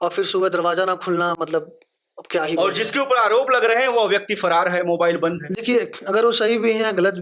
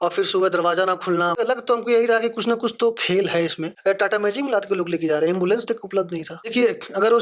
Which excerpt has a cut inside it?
second; 3 cuts; at 1.4 s, 3.7 s, 6.4 s

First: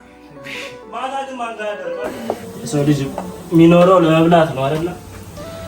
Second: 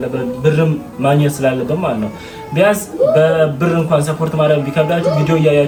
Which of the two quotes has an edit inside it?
first; 1 cut; at 2.2 s

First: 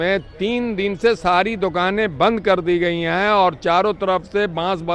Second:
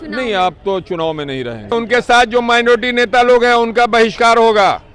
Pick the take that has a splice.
second; 1 cut; at 1.7 s

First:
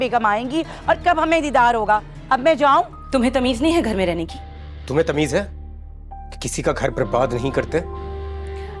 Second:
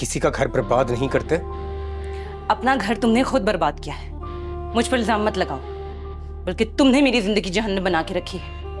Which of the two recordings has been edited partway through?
first; 1 cut; at 3.0 s

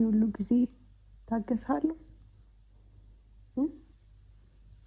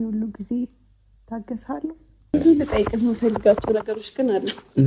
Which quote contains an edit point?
second; 1 cut; at 2.3 s

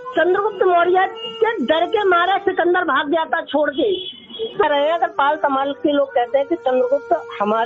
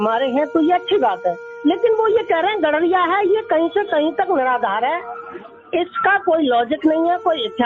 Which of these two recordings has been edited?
first; 1 cut; at 4.6 s

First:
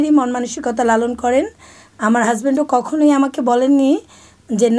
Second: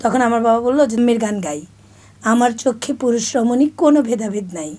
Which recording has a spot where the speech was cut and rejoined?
second; 1 cut; at 1.0 s

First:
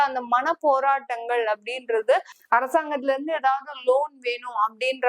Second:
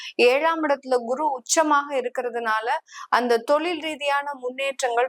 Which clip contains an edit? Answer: first; 1 cut; at 2.3 s

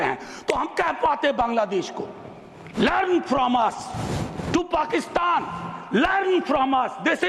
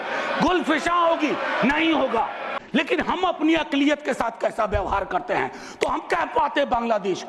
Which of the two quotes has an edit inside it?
second; 1 cut; at 2.5 s

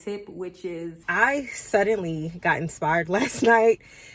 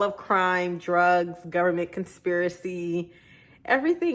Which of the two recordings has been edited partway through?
first; 1 cut; at 1.0 s

